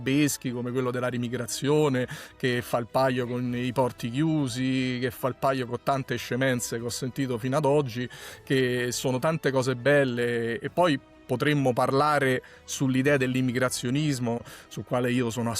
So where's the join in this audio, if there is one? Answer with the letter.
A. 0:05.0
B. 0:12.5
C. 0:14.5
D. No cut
C